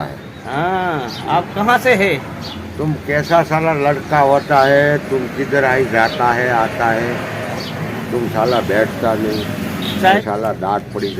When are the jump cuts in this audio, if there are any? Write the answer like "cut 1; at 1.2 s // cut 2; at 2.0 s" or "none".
cut 1; at 10.2 s